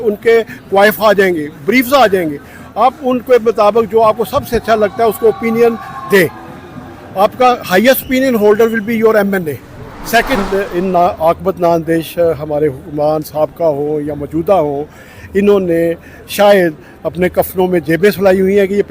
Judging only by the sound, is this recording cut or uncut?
cut